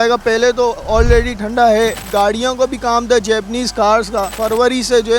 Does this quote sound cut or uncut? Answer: cut